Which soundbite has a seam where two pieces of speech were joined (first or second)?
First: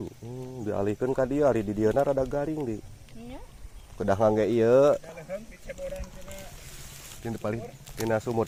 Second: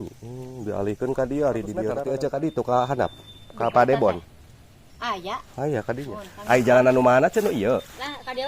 second